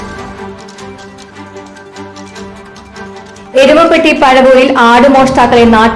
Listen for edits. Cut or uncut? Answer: uncut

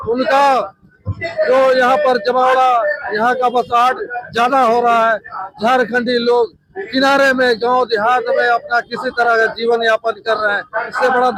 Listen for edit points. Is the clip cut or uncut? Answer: uncut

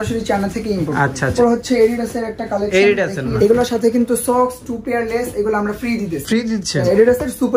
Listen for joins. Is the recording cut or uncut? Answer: cut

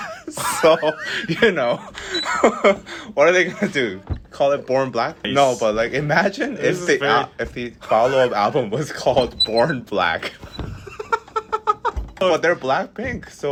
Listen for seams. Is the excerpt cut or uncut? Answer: uncut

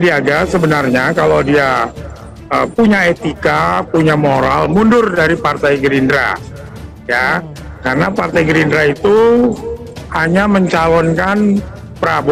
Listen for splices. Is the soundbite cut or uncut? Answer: uncut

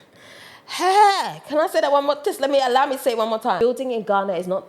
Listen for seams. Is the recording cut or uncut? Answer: cut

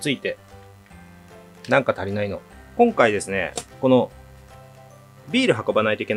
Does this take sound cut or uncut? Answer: cut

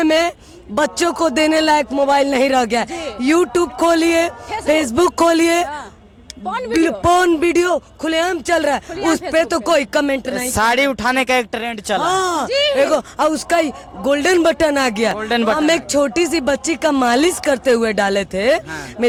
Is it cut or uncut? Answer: uncut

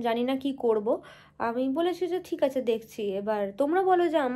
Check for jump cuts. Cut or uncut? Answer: uncut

